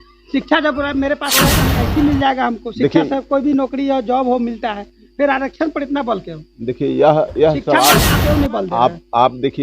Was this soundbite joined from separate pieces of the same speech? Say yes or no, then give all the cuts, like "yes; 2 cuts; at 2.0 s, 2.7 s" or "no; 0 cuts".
yes; 2 cuts; at 1.6 s, 8.1 s